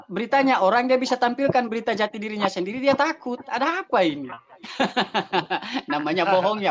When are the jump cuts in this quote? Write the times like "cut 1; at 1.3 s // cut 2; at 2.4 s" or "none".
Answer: none